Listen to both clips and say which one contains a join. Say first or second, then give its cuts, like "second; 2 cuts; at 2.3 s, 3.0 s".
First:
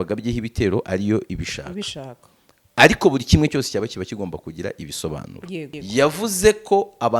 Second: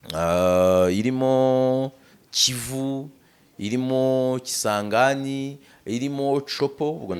first; 1 cut; at 5.8 s